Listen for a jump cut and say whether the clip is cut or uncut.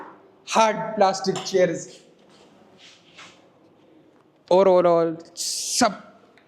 uncut